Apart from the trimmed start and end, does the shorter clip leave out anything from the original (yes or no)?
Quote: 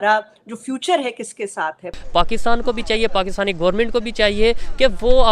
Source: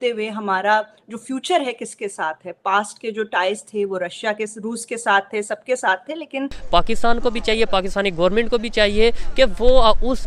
yes